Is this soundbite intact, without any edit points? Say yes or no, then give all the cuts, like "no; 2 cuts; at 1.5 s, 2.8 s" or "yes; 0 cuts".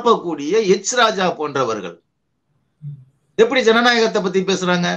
yes; 0 cuts